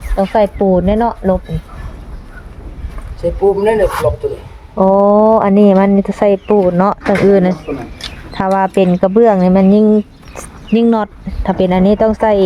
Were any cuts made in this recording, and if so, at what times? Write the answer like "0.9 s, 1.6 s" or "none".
none